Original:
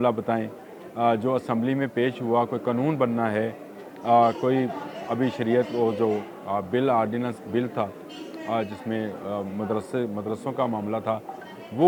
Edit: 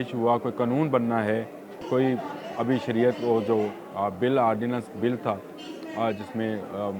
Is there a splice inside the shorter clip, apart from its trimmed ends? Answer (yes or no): yes